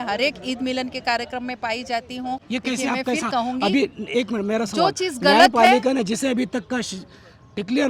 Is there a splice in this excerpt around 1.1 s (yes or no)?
no